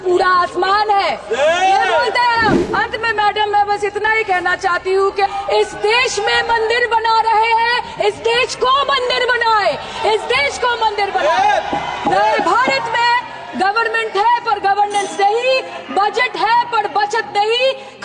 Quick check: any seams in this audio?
yes; 2 cuts; at 2.7 s, 5.3 s

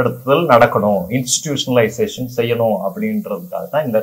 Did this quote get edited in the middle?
no; 0 cuts

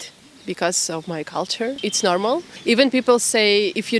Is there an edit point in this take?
yes; 1 cut; at 2.1 s

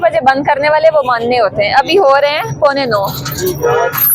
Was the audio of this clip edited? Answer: no; 0 cuts

